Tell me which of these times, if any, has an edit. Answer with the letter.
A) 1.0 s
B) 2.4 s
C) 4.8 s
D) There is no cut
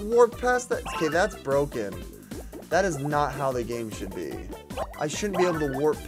C